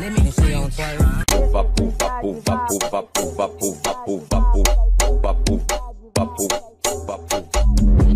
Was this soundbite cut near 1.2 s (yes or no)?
yes